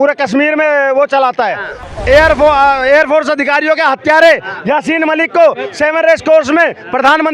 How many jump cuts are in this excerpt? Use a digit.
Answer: 1